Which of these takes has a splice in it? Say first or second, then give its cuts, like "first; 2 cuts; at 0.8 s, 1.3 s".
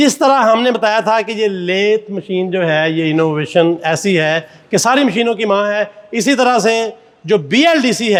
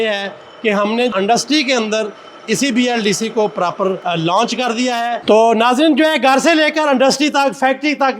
second; 3 cuts; at 1.1 s, 4.0 s, 5.2 s